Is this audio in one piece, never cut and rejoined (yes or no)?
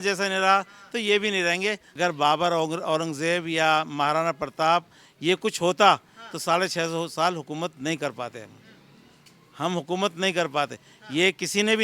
no